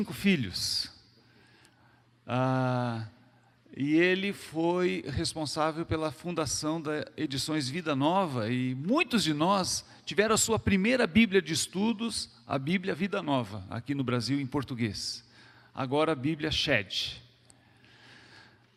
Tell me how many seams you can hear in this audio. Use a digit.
0